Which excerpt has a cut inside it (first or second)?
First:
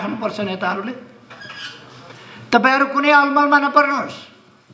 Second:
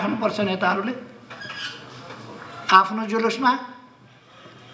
first